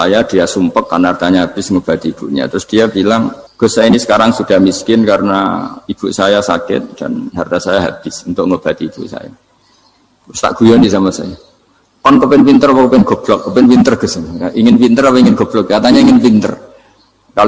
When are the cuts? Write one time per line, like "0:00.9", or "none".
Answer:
0:03.4